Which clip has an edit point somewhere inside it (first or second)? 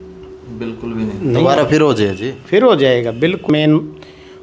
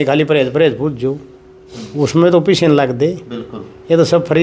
first